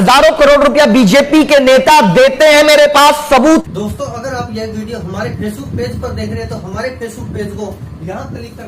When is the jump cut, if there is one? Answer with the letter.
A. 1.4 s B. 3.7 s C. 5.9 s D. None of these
B